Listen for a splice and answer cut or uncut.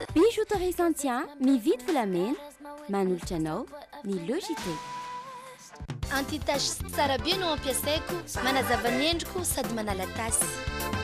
cut